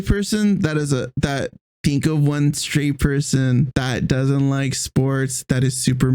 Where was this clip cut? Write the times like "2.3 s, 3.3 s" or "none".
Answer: 1.6 s, 3.7 s